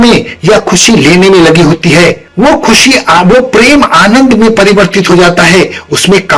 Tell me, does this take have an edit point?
no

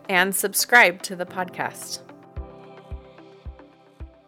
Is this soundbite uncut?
no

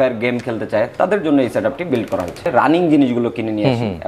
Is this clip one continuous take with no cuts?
no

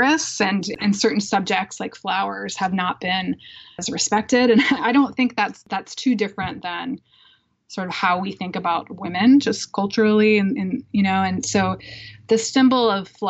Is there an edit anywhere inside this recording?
yes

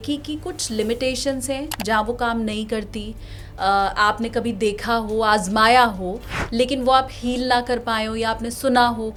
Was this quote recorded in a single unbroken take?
yes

